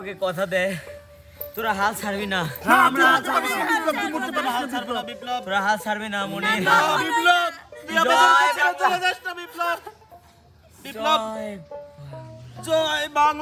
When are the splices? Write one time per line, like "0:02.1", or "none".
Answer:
none